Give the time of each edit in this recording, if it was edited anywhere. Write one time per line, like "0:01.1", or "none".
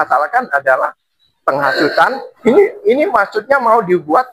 0:02.3

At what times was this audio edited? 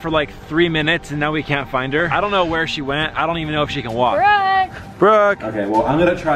0:02.1
0:04.1
0:05.4

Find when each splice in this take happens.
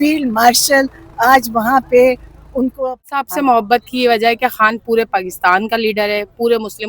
0:03.0

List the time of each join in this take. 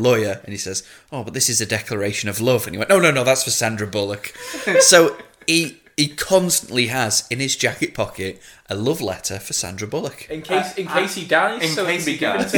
none

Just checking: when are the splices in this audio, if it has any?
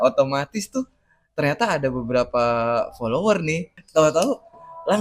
0:03.8

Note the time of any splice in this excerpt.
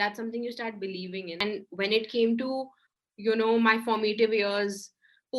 0:01.4

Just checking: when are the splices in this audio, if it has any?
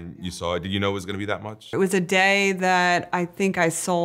0:01.7

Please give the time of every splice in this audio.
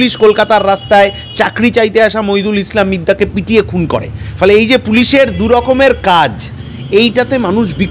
none

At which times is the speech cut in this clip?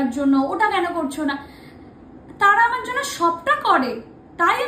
none

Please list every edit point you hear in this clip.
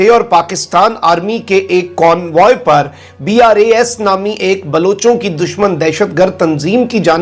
none

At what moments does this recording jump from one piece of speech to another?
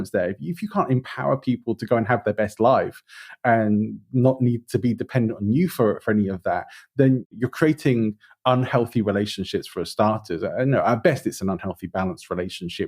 0:07.3

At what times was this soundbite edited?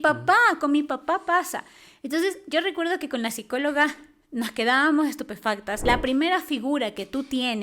0:05.8

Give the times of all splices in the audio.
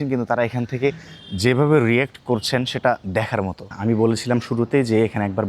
0:03.7

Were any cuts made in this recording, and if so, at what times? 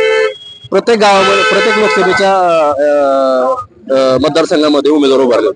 none

